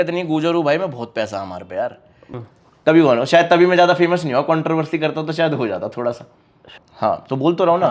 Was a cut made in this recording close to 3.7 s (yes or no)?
no